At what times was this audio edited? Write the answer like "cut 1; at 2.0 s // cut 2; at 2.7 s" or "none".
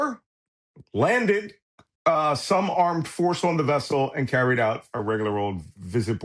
none